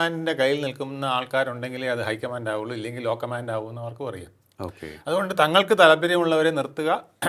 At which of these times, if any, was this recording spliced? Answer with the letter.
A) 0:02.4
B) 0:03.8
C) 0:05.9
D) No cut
D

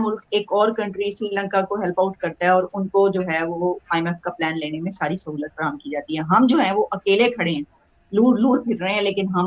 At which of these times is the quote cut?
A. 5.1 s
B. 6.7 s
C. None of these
C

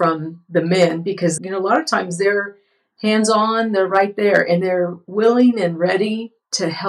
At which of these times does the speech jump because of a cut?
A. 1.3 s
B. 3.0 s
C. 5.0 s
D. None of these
A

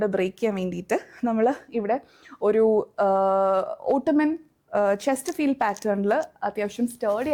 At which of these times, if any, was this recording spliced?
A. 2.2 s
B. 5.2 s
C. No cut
C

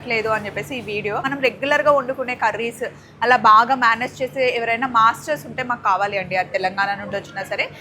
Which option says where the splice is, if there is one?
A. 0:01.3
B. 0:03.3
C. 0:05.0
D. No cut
A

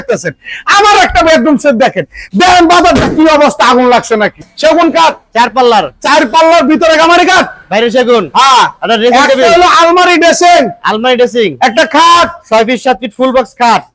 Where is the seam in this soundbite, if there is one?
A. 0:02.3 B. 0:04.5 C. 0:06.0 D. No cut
B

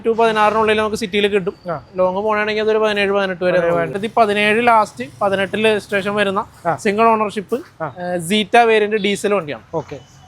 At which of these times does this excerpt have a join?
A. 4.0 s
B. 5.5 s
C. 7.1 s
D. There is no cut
A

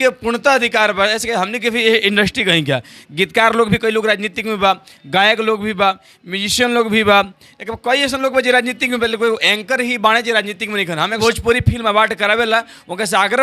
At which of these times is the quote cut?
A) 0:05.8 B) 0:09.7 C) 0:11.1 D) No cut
C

